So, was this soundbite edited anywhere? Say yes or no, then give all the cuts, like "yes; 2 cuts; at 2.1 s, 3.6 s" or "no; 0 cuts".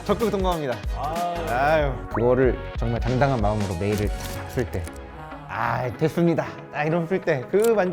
yes; 1 cut; at 2.0 s